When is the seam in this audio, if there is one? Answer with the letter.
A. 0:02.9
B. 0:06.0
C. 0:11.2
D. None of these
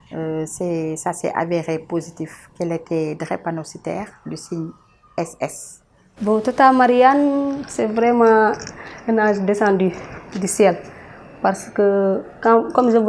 B